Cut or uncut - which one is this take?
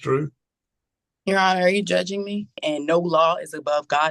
cut